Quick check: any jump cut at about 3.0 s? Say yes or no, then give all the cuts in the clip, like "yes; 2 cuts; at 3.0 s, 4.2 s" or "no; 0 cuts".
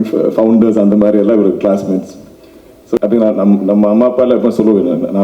yes; 1 cut; at 3.0 s